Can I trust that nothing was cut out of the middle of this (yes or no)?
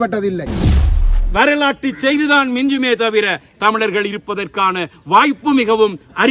no